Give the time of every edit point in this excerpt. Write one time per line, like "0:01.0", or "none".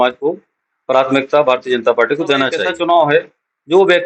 0:03.1